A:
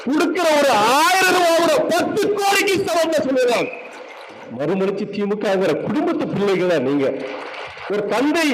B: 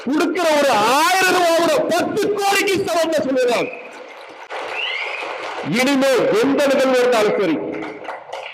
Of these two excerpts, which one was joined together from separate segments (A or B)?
A